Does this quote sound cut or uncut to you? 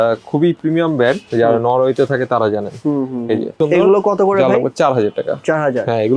cut